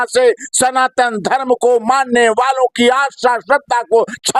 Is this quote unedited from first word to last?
yes; 0 cuts

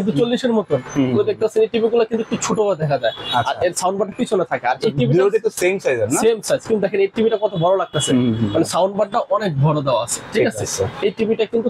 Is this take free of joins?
yes; 0 cuts

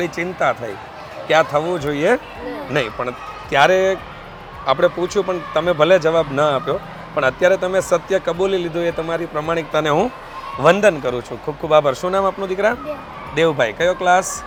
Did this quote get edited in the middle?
no; 0 cuts

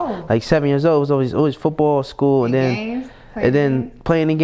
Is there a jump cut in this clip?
no; 0 cuts

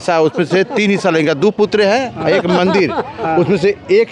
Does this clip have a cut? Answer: no; 0 cuts

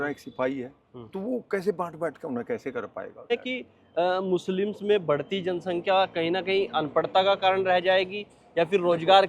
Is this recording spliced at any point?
yes; 1 cut; at 3.3 s

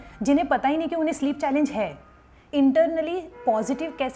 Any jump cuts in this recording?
yes; 1 cut; at 2.4 s

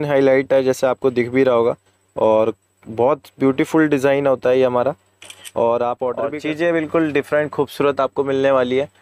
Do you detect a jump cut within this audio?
yes; 1 cut; at 6.3 s

